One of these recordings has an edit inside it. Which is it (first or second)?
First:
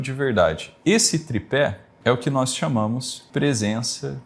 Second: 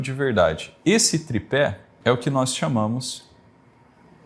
first